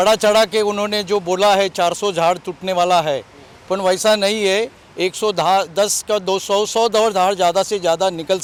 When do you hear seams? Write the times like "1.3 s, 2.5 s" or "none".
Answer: none